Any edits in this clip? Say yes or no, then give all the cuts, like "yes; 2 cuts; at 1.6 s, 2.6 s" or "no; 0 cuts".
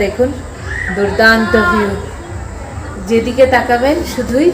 no; 0 cuts